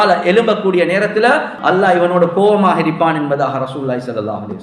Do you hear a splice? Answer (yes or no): yes